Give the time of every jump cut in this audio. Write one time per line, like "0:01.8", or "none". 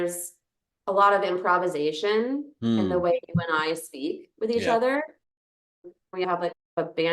0:06.2